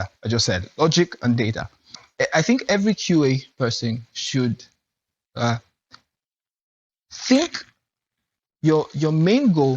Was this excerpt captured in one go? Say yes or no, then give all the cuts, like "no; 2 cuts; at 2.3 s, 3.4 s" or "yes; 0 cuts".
no; 1 cut; at 2.0 s